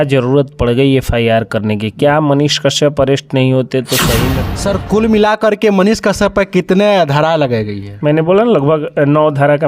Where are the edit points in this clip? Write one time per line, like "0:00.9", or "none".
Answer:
0:04.4